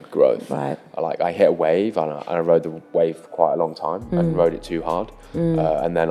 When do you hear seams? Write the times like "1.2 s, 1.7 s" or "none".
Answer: none

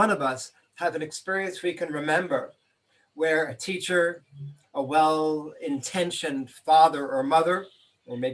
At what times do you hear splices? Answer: none

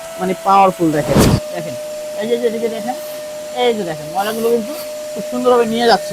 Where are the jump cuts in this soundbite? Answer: 1.3 s

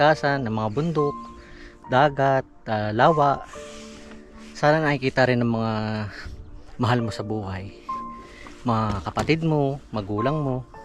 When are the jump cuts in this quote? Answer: none

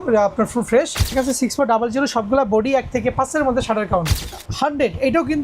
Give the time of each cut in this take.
1.1 s, 4.3 s

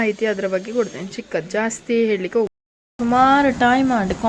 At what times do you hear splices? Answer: 2.5 s

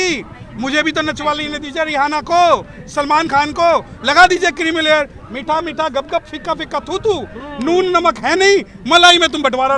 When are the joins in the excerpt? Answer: none

